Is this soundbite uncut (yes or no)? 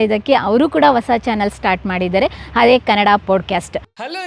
yes